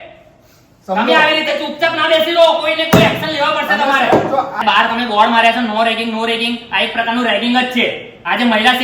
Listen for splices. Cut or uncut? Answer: cut